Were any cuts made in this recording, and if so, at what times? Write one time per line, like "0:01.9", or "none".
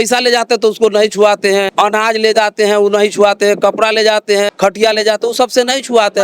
0:01.7
0:04.5